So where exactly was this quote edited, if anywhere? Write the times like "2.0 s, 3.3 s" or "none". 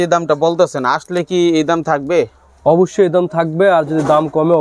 none